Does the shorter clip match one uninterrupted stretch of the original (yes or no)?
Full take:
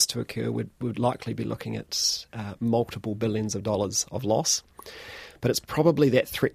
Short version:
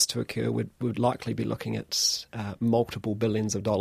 yes